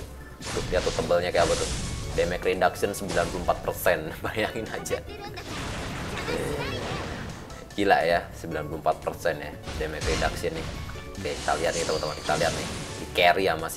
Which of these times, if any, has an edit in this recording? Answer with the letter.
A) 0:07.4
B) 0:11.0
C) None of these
B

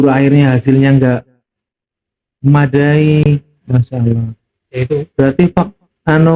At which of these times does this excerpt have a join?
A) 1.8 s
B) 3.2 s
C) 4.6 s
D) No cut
D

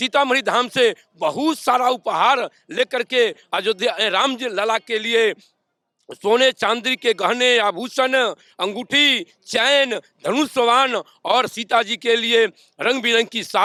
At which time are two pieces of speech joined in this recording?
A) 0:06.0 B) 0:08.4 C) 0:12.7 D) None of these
D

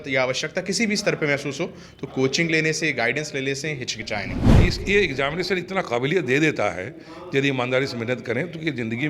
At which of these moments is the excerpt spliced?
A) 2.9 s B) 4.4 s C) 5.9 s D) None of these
B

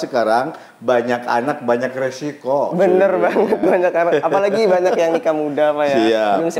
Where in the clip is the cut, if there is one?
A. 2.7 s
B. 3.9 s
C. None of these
C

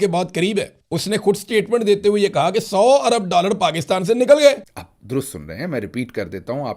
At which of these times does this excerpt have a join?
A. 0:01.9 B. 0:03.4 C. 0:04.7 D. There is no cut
C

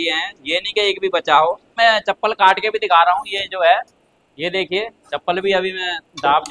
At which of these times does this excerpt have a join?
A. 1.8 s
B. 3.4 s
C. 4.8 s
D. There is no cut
A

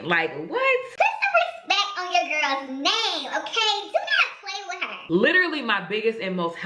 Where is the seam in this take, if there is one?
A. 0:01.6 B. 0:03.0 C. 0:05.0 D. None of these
C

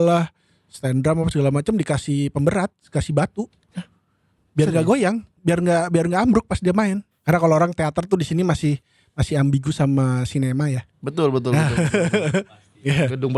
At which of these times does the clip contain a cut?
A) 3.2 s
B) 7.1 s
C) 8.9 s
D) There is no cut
B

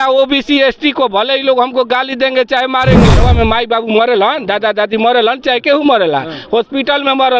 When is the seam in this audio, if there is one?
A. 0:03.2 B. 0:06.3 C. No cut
A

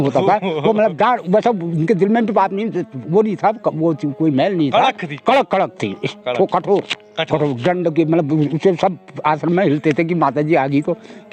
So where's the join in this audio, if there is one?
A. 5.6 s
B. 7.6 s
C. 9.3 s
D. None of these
D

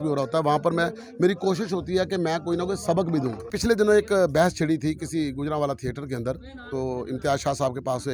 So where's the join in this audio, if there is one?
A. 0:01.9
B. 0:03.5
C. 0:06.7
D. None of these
B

